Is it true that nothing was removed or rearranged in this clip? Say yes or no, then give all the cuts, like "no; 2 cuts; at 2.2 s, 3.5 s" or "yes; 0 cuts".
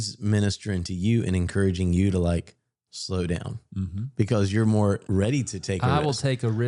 no; 1 cut; at 5.0 s